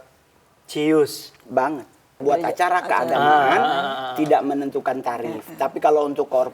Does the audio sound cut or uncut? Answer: cut